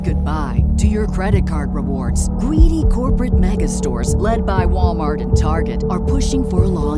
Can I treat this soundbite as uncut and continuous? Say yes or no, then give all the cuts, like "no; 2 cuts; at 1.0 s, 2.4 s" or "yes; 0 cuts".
yes; 0 cuts